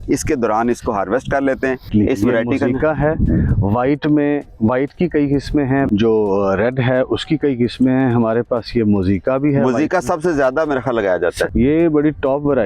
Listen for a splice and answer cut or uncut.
cut